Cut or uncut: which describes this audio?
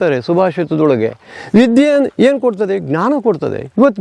uncut